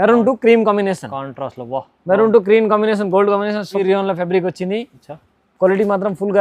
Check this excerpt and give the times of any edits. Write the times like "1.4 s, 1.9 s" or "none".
3.8 s

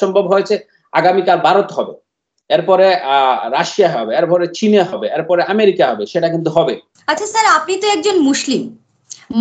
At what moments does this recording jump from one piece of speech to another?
6.9 s

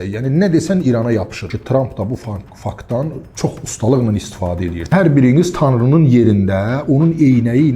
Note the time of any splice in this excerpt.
1.5 s, 4.9 s

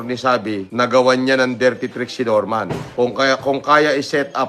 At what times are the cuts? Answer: 2.9 s

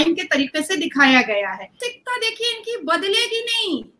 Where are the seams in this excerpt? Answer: 1.8 s

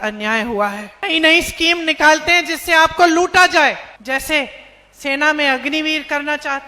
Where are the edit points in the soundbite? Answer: 1.0 s, 3.9 s

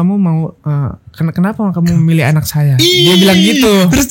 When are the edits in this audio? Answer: none

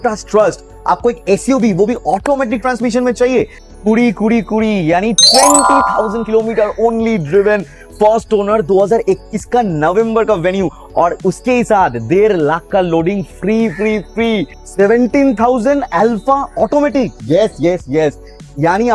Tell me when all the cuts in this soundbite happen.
3.6 s, 14.6 s

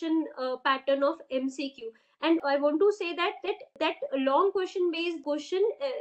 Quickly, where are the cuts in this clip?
2.4 s, 3.8 s, 5.2 s

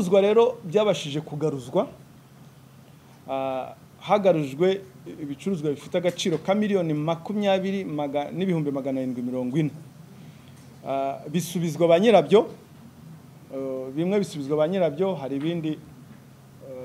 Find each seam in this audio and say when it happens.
none

